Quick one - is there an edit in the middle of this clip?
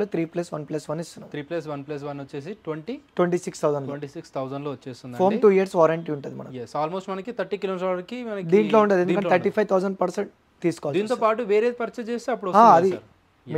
no; 0 cuts

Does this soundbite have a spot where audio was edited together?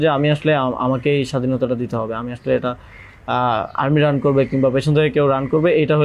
no; 0 cuts

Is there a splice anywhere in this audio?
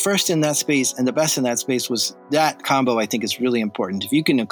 yes; 1 cut; at 2.1 s

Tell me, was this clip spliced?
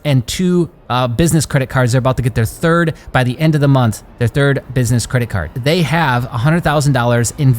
yes; 1 cut; at 5.5 s

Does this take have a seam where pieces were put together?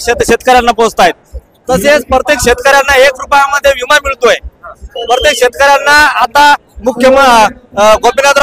no; 0 cuts

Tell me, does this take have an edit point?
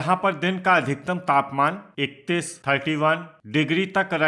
yes; 2 cuts; at 1.9 s, 3.3 s

